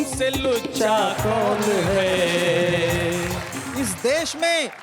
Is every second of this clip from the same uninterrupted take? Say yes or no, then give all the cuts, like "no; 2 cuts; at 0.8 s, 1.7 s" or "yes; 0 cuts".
no; 1 cut; at 3.6 s